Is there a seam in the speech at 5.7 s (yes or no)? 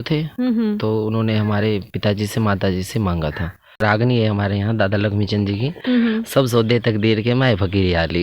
no